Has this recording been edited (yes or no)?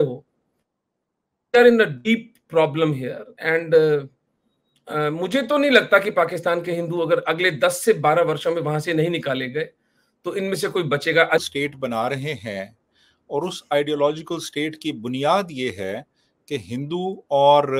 yes